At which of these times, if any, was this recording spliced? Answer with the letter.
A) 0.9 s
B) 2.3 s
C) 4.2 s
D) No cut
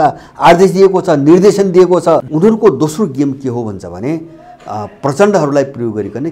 B